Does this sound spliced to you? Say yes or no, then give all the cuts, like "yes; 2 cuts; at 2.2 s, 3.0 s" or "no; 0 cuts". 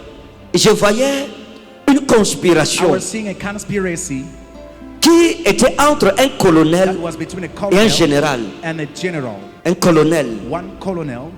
yes; 1 cut; at 9.5 s